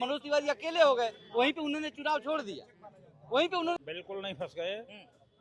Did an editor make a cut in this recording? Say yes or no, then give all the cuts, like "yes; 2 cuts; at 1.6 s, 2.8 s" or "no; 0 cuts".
yes; 1 cut; at 3.8 s